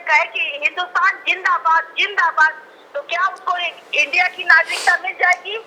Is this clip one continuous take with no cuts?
yes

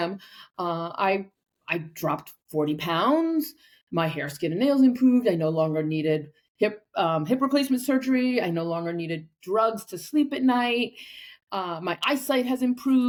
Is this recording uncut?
yes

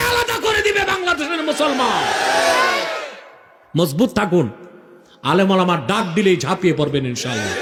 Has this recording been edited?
no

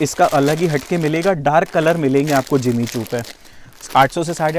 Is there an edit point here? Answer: no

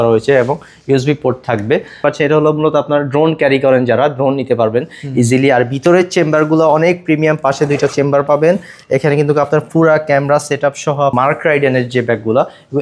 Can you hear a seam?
yes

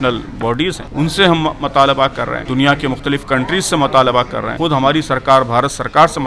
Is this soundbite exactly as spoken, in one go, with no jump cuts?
no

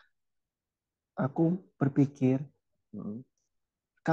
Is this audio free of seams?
yes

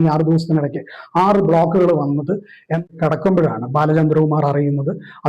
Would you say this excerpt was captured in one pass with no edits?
no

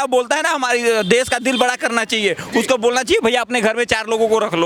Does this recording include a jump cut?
no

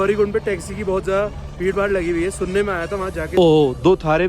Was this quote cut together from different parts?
yes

